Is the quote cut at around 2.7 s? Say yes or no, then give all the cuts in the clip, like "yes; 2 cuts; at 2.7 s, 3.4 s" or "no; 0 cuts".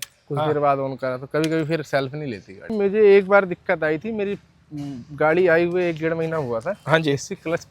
yes; 1 cut; at 2.7 s